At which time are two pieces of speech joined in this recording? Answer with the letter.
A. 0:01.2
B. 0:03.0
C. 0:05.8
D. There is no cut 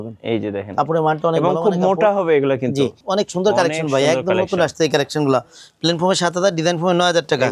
B